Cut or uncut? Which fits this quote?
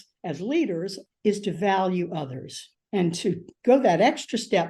cut